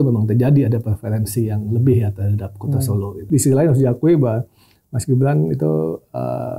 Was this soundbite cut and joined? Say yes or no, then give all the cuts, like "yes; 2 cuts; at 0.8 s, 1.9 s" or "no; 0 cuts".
yes; 1 cut; at 3.2 s